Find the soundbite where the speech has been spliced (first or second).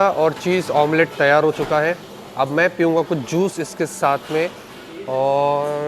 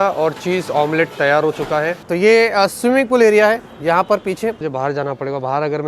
second